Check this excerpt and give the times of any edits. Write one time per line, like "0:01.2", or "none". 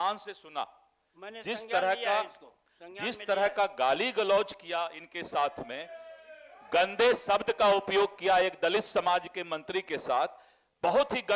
none